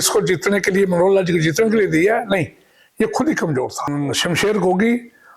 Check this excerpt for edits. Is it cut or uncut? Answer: cut